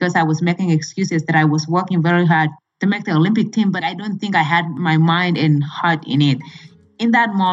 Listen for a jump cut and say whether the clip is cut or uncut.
cut